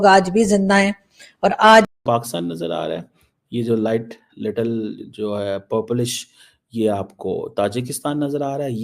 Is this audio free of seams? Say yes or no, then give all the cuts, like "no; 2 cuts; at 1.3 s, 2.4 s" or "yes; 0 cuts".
no; 1 cut; at 1.9 s